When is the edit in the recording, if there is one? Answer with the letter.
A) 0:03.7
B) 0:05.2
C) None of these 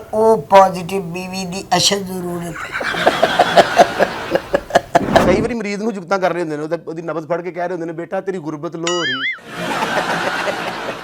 B